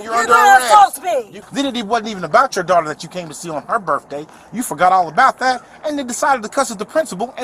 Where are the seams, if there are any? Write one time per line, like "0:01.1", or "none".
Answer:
0:01.4